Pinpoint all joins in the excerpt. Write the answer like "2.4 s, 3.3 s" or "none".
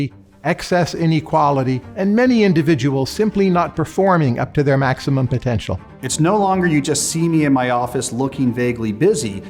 1.8 s, 6.0 s